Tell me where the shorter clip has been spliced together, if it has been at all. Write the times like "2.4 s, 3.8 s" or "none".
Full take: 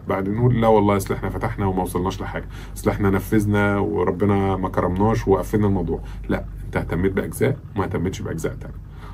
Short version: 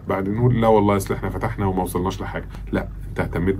2.6 s